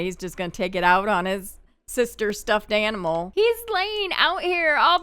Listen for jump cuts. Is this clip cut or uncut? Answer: cut